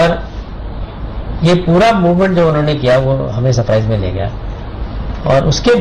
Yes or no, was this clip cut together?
yes